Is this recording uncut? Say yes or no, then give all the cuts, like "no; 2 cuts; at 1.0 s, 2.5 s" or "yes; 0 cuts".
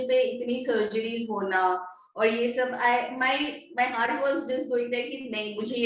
yes; 0 cuts